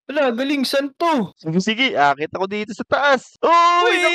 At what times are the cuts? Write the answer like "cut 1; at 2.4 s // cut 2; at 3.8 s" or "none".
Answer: cut 1; at 1.3 s

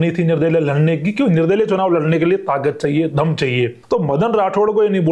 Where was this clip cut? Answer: cut 1; at 3.8 s

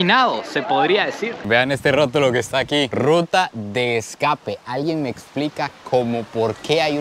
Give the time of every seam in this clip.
cut 1; at 1.4 s

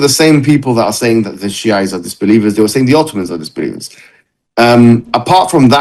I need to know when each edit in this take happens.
none

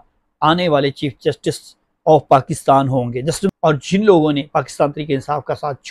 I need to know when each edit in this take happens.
cut 1; at 3.5 s

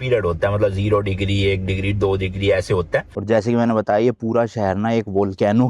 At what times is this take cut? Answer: cut 1; at 3.2 s

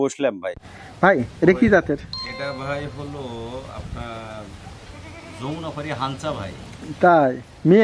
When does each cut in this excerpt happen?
none

